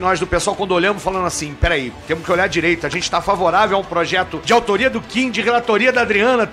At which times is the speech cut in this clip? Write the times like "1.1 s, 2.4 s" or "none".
none